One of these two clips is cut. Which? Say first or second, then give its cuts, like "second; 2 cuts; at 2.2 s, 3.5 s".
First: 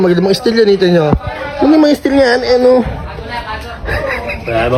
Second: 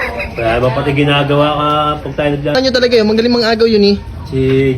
second; 1 cut; at 2.5 s